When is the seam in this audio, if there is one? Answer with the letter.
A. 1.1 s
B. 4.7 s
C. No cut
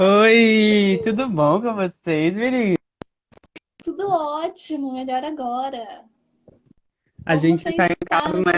C